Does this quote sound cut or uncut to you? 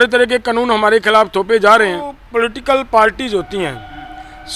cut